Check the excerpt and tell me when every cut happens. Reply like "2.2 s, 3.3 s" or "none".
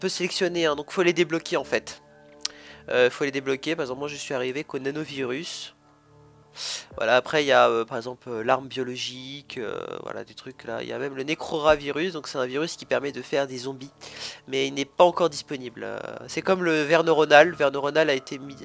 4.1 s